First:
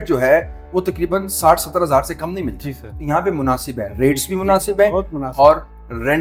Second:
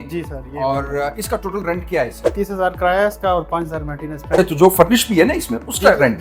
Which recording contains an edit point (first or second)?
second